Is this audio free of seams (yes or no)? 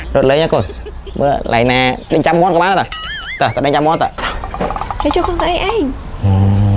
no